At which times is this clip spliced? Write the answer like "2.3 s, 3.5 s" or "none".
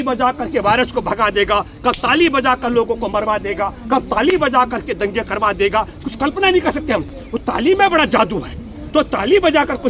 none